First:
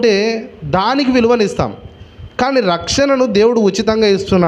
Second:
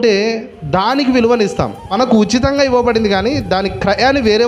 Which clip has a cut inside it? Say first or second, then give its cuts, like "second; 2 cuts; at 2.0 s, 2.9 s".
second; 1 cut; at 2.3 s